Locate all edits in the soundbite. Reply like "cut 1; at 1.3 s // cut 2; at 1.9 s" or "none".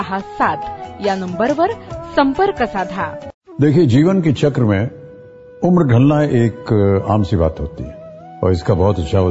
cut 1; at 3.2 s